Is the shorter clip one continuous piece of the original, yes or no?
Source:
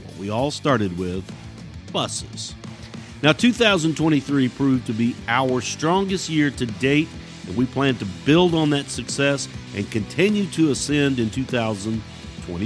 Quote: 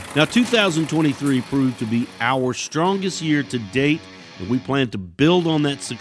yes